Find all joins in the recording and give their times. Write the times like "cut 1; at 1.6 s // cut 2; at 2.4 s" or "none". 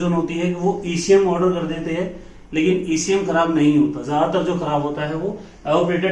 none